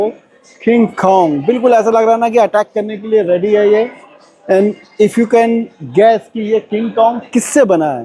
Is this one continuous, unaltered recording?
yes; 0 cuts

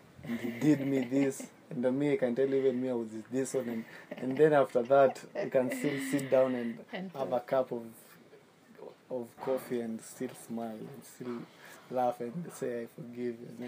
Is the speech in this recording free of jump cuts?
yes; 0 cuts

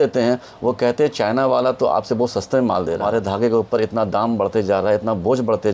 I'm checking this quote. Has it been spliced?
yes; 1 cut; at 3.0 s

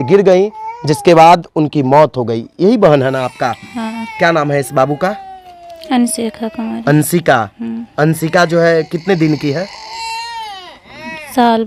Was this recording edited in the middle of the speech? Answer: no; 0 cuts

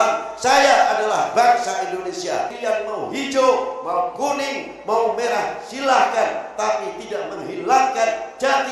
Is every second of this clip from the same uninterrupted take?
no; 1 cut; at 2.5 s

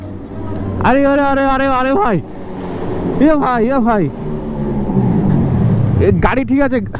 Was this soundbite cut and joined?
no; 0 cuts

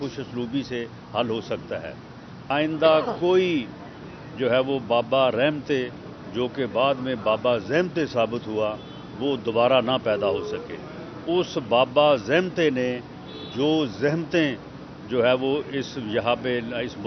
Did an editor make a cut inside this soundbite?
yes; 1 cut; at 2.5 s

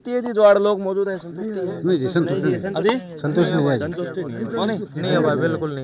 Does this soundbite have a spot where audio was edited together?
no; 0 cuts

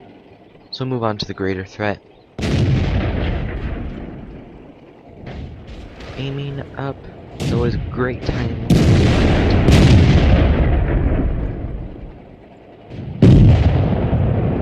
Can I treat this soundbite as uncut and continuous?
no; 1 cut; at 9.3 s

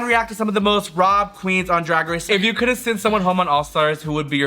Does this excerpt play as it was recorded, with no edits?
no; 1 cut; at 2.2 s

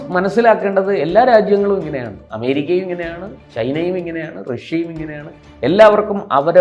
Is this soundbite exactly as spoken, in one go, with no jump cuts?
yes; 0 cuts

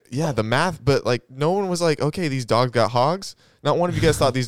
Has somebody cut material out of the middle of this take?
no; 0 cuts

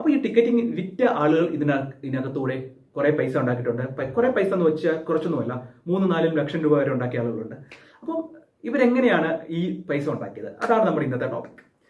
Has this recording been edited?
no; 0 cuts

